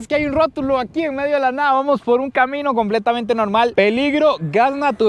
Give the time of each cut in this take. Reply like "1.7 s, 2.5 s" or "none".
none